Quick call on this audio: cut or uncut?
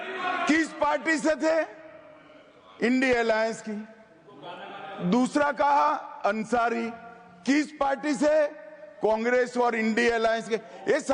uncut